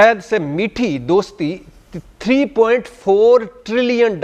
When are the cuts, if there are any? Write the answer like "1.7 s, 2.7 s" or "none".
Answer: none